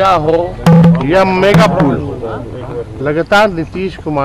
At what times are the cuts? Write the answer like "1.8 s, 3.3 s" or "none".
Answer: none